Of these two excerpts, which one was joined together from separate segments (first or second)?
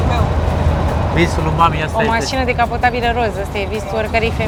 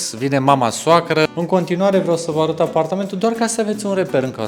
second